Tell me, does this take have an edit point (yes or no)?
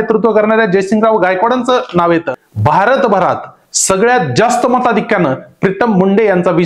yes